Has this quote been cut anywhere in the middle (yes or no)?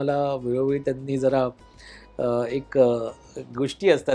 no